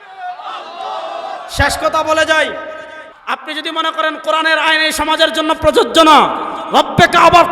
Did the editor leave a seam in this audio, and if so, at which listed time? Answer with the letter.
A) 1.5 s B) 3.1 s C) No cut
B